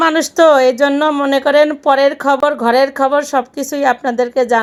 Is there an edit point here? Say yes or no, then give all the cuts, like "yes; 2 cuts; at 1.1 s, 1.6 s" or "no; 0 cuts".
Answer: no; 0 cuts